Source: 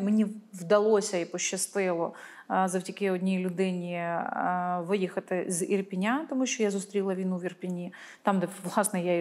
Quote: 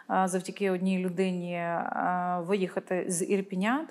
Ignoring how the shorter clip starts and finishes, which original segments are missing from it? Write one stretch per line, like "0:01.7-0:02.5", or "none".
none